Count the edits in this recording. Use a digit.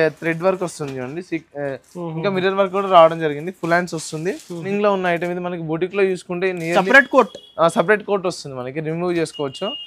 1